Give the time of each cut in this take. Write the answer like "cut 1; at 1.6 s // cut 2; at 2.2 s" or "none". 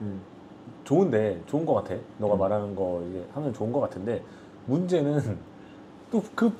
none